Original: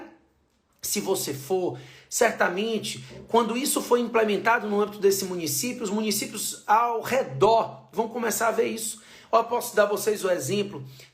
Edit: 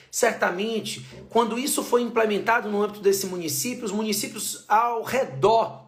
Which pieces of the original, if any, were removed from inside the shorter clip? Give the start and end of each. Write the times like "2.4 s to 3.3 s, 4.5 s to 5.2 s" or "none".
none